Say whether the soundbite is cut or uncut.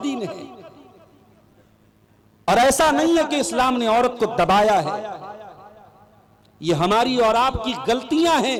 uncut